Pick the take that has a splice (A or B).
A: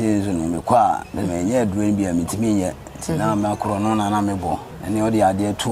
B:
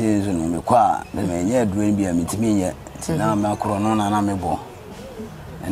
A